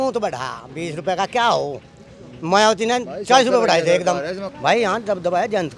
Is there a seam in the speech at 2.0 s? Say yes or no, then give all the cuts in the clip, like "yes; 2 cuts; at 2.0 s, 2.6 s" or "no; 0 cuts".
no; 1 cut; at 4.4 s